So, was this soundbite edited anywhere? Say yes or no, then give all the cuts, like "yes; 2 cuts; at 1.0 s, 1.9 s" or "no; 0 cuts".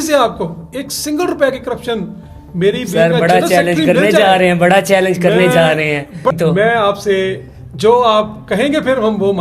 yes; 1 cut; at 6.3 s